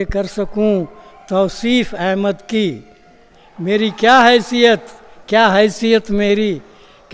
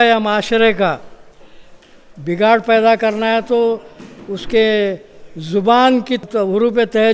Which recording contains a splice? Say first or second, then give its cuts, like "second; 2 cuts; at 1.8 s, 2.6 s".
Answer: second; 1 cut; at 6.2 s